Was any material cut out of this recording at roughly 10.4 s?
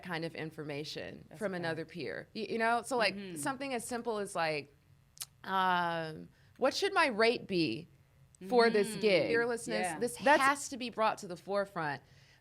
yes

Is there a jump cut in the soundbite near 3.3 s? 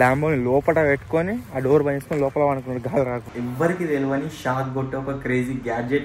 yes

